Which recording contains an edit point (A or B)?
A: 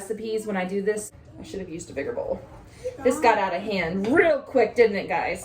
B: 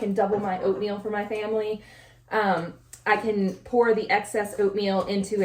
A